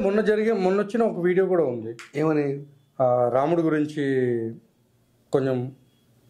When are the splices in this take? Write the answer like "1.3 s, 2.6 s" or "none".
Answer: none